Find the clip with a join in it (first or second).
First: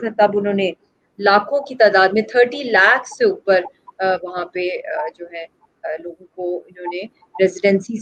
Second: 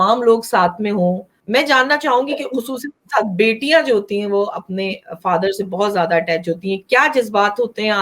second